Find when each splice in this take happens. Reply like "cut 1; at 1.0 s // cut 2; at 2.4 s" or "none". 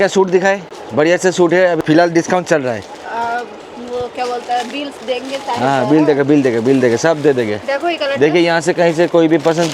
none